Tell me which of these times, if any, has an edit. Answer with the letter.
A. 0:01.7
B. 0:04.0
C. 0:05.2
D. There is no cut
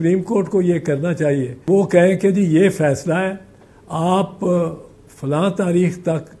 A